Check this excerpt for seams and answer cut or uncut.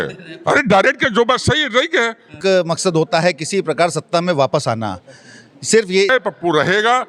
cut